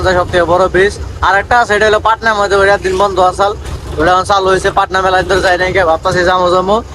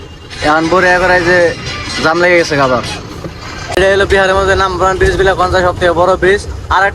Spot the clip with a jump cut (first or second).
second